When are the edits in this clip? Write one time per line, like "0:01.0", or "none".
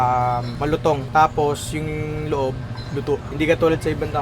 0:01.0